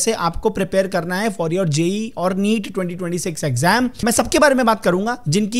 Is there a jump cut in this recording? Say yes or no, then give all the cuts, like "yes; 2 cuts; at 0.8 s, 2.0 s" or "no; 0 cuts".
yes; 1 cut; at 4.0 s